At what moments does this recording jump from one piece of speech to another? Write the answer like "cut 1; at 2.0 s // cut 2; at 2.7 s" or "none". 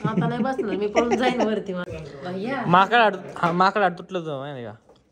cut 1; at 1.8 s